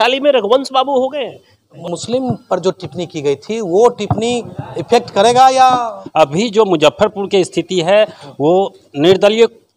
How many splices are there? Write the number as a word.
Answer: two